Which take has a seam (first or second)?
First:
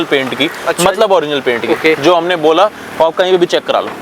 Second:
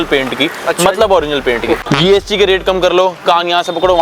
second